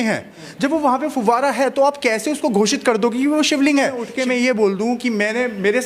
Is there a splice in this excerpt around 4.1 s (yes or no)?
yes